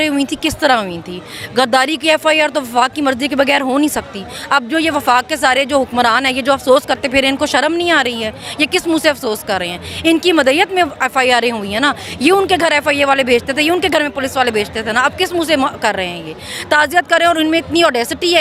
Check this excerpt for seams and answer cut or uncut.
uncut